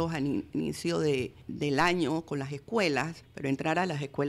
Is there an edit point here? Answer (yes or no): yes